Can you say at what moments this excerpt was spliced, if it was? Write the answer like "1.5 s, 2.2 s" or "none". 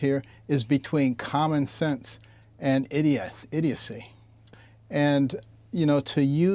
4.4 s

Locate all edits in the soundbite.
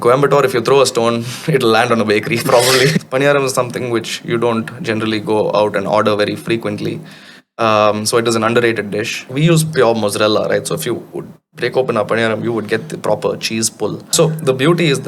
3.0 s, 9.3 s, 14.0 s

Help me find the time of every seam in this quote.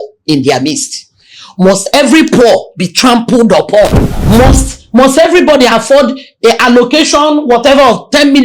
4.1 s

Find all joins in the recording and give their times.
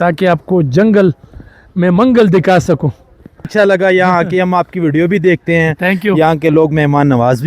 3.5 s

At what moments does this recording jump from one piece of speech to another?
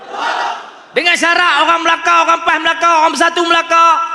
none

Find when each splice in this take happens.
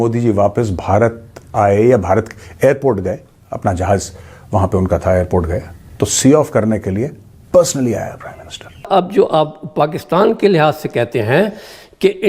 8.8 s

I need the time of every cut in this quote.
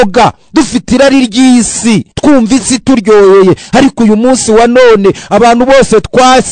2.1 s

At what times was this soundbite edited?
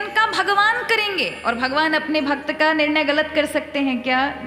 none

